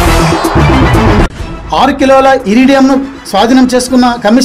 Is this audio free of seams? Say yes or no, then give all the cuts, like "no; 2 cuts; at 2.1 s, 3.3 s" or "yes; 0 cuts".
no; 1 cut; at 1.3 s